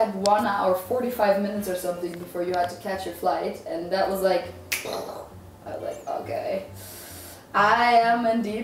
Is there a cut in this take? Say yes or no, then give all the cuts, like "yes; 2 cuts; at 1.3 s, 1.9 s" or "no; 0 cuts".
no; 0 cuts